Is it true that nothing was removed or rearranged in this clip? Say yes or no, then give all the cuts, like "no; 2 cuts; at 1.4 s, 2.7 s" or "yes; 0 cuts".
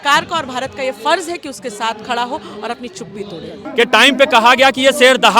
no; 1 cut; at 3.6 s